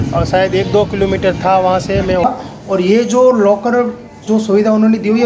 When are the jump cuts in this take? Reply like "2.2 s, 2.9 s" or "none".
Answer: 2.2 s